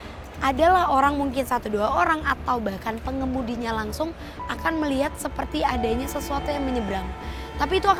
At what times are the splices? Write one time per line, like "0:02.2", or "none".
none